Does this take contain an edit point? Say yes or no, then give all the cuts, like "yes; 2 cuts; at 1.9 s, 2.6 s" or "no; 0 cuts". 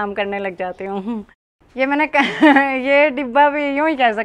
yes; 1 cut; at 1.4 s